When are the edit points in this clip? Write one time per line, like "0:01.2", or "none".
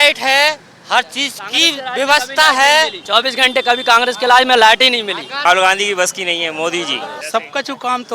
0:03.0
0:05.4
0:07.2